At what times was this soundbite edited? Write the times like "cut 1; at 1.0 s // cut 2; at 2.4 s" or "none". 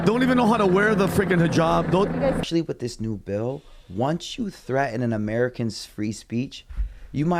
cut 1; at 2.4 s